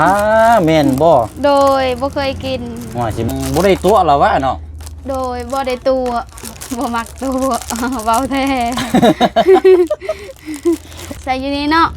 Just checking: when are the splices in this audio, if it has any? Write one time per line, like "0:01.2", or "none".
0:03.3
0:11.0